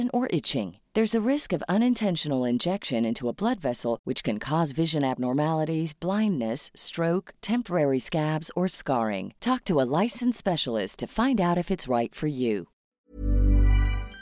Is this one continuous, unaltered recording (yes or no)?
no